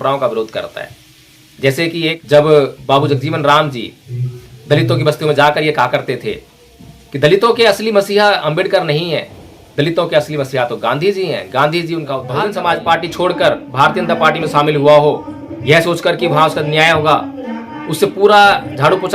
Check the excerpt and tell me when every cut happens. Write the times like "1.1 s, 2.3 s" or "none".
2.2 s, 12.2 s